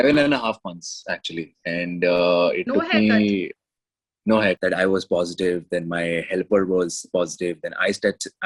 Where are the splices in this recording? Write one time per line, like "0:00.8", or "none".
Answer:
0:04.6

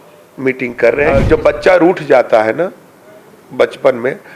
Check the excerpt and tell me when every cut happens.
0:01.1

